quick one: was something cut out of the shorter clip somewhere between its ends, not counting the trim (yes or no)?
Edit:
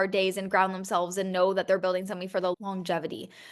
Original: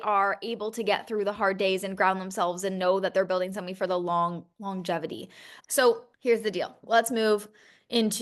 yes